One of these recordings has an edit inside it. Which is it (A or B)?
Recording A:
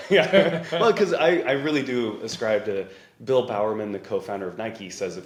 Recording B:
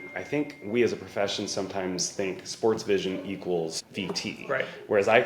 B